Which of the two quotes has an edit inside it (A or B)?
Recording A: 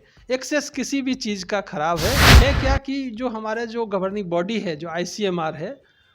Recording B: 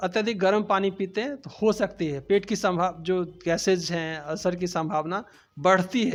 A